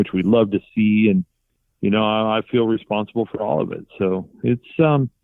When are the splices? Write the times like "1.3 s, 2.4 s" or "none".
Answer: 1.4 s